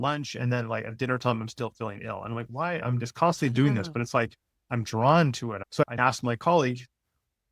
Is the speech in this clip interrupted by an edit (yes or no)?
yes